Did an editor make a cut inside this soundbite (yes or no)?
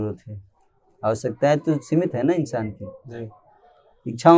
no